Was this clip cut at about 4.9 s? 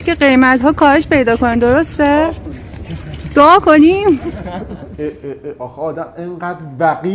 yes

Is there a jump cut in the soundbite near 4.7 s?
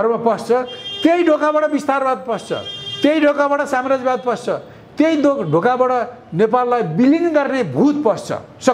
no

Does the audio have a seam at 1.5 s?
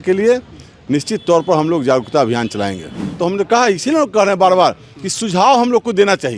no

